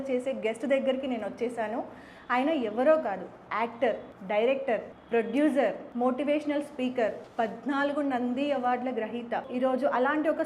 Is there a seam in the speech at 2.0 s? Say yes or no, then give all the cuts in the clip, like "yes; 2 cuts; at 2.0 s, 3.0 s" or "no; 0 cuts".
no; 5 cuts; at 4.1 s, 4.9 s, 5.8 s, 7.2 s, 9.5 s